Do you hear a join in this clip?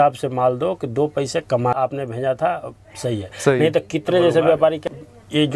yes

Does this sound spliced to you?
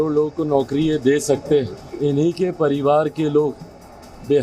yes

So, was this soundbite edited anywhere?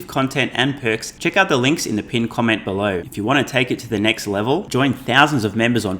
yes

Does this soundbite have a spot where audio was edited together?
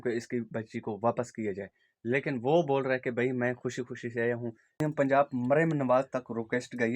yes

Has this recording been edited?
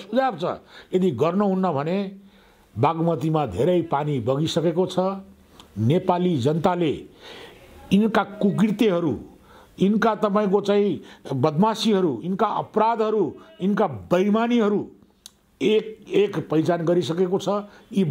no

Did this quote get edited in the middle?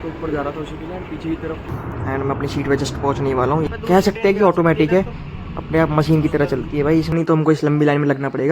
yes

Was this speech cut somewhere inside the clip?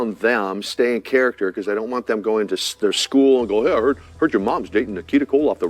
no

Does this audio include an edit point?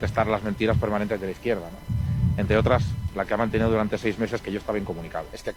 no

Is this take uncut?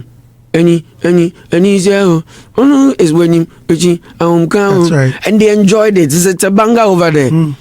yes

